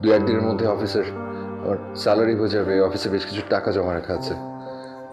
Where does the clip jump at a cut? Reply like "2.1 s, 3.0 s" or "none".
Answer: none